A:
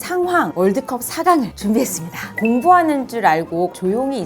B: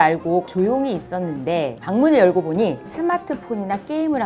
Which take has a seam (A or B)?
A